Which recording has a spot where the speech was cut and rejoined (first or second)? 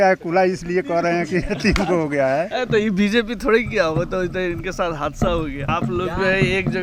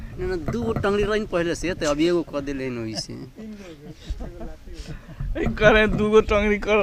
first